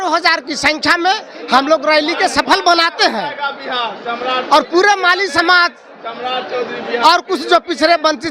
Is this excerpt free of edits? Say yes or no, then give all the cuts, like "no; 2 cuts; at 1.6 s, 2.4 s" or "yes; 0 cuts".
yes; 0 cuts